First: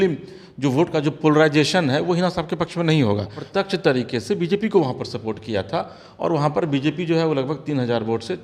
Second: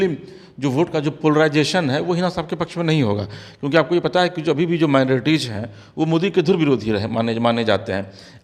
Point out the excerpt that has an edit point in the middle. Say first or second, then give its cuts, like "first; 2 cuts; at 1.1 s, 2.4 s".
first; 1 cut; at 3.4 s